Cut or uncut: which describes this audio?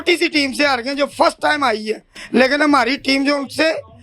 uncut